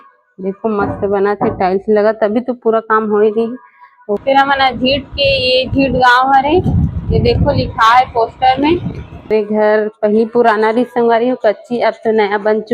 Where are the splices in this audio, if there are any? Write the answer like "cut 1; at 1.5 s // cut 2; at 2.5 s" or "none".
cut 1; at 4.2 s // cut 2; at 9.3 s